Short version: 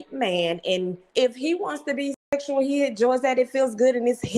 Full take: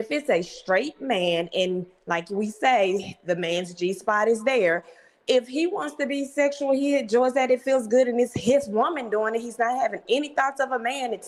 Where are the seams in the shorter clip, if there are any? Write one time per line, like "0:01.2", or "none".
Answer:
0:01.0